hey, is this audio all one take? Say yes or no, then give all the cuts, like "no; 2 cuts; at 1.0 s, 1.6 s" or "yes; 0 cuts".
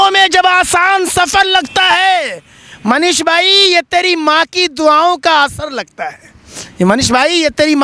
yes; 0 cuts